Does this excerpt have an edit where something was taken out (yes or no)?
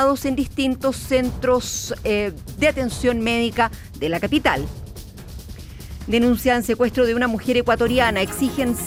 no